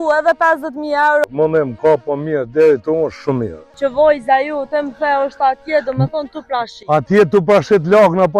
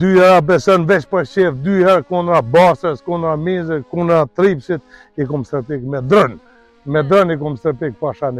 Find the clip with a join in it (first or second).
first